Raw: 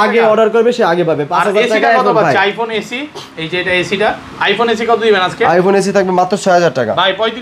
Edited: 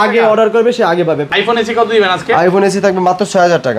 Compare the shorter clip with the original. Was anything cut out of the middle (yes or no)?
yes